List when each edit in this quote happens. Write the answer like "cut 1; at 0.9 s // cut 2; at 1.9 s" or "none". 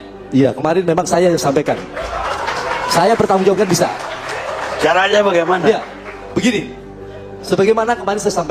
none

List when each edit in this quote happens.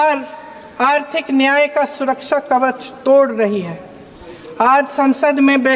none

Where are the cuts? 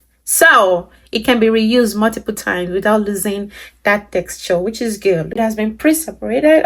cut 1; at 5.4 s

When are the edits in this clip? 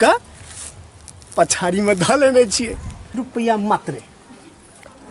cut 1; at 3.2 s

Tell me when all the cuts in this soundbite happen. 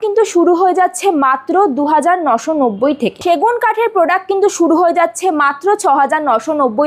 cut 1; at 3.2 s

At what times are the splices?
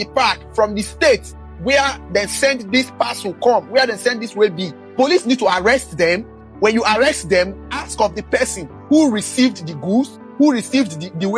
none

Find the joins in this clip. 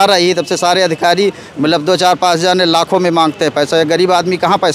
none

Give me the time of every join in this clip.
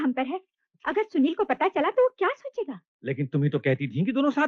none

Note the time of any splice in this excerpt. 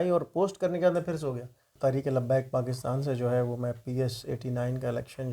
cut 1; at 1.7 s

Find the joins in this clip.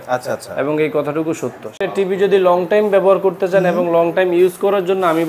cut 1; at 1.8 s

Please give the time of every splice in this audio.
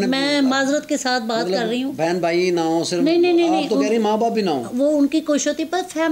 none

